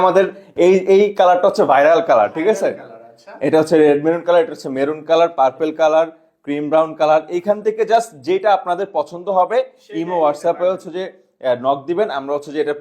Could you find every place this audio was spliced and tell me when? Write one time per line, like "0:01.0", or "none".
none